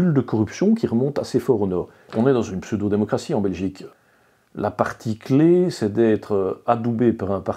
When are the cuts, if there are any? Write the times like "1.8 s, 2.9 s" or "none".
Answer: 2.1 s, 3.9 s